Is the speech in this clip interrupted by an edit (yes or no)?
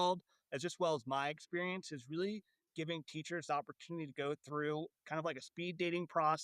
yes